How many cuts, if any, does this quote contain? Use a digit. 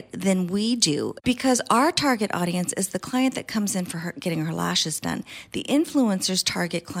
1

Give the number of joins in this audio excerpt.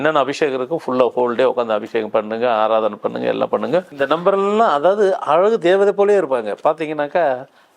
1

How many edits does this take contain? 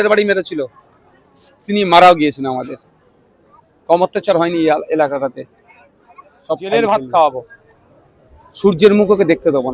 1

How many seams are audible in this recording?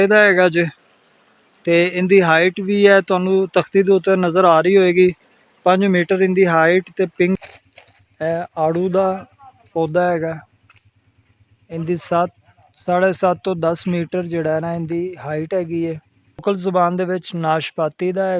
2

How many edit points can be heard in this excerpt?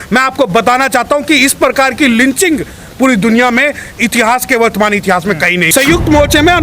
1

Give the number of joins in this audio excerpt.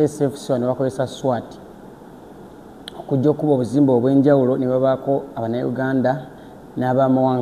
0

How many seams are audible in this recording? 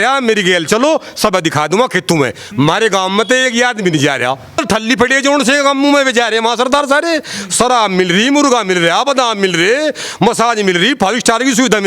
1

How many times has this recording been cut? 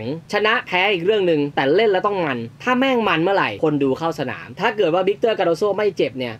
1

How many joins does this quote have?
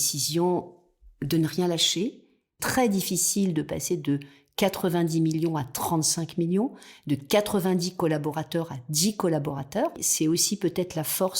2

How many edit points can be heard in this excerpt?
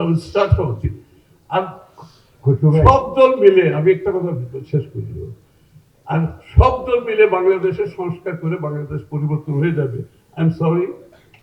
0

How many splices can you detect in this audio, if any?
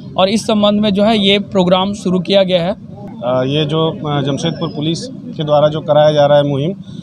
1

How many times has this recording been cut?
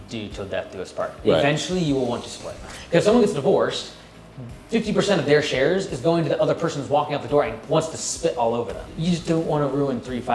2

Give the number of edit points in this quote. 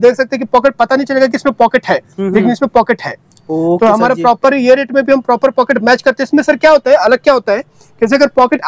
0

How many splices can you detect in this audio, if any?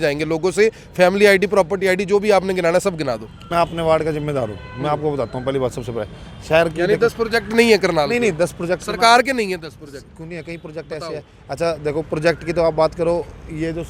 1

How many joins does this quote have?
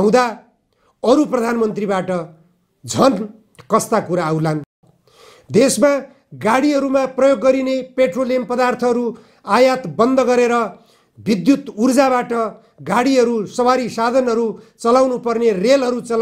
1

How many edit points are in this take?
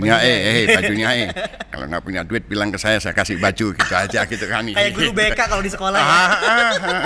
0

